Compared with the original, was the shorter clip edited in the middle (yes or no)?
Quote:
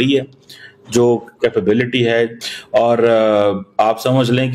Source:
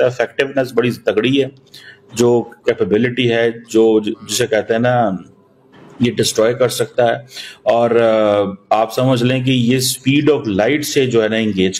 yes